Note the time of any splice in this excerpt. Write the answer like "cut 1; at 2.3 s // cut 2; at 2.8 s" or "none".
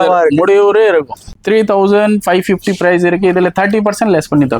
cut 1; at 1.3 s